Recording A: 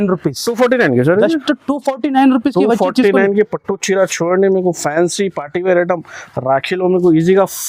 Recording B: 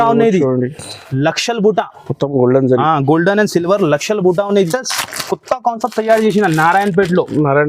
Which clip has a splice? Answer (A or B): B